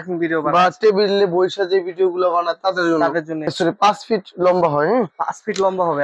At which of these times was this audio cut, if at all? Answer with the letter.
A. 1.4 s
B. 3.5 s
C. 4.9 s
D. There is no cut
B